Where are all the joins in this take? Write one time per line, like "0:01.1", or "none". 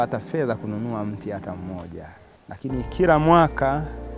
0:02.5